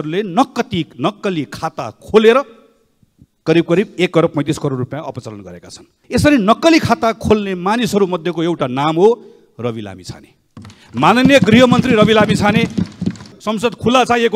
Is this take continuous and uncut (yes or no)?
no